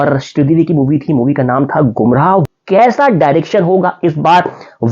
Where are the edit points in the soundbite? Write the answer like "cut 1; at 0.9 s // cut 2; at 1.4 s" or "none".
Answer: cut 1; at 2.5 s